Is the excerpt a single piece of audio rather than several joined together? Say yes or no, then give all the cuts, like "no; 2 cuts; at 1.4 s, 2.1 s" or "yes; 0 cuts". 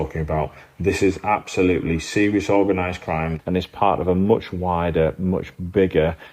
no; 1 cut; at 3.3 s